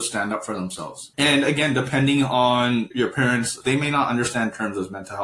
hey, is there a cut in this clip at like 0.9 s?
yes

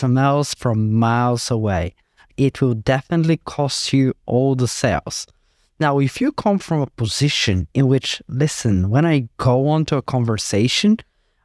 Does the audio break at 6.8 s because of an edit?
no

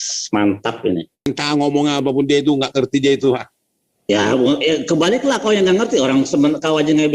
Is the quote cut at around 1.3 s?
yes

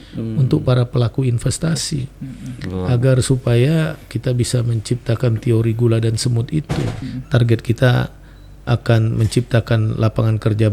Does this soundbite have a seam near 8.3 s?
no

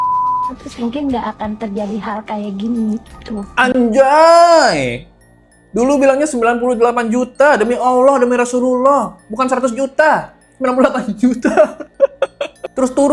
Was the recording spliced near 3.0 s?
no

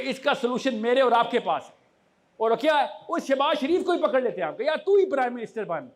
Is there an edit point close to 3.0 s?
no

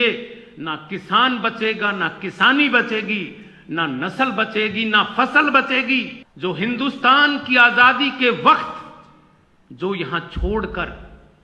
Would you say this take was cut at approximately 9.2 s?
no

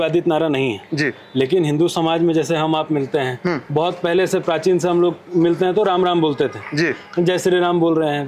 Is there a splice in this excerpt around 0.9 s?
no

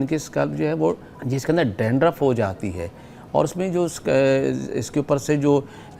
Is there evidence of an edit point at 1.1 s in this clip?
yes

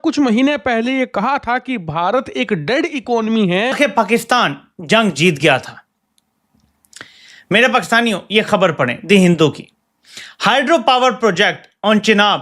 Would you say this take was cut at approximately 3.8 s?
yes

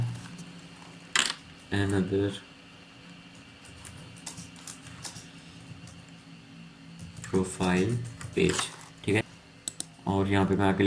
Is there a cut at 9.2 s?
yes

